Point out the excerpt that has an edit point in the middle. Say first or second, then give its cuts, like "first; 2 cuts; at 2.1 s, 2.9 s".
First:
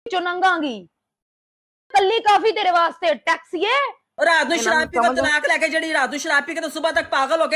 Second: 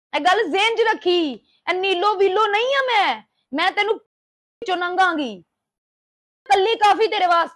first; 1 cut; at 4.0 s